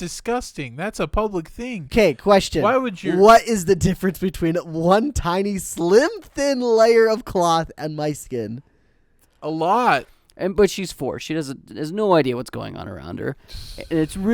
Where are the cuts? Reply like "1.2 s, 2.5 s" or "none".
10.0 s